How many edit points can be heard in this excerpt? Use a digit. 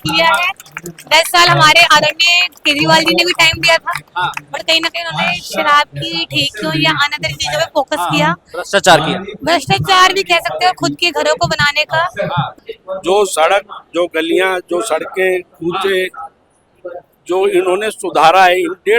1